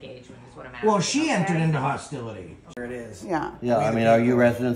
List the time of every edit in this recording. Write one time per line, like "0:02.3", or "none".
0:02.7